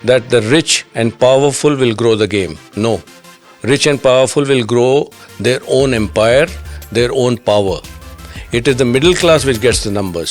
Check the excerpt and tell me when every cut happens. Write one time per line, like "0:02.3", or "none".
none